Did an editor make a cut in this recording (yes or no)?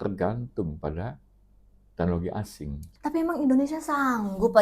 yes